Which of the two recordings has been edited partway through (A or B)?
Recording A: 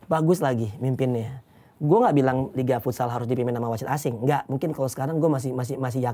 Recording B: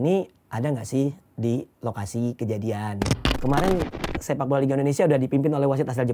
B